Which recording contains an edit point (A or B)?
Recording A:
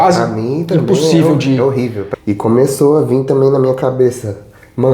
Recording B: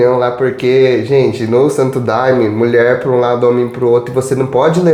A